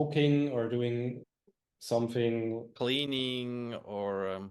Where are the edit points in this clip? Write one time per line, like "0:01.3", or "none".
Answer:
0:01.2